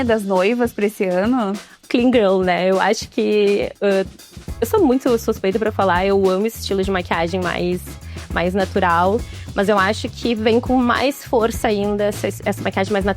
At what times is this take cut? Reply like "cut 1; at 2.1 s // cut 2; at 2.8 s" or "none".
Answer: cut 1; at 1.8 s